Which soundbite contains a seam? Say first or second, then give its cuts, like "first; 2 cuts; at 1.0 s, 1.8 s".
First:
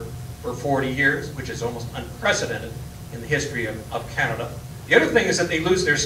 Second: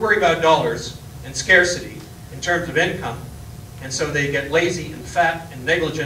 first; 1 cut; at 4.7 s